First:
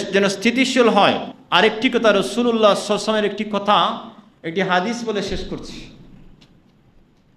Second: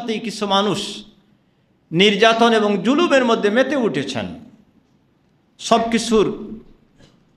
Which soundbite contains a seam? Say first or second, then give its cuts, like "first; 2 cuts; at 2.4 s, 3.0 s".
first; 1 cut; at 1.3 s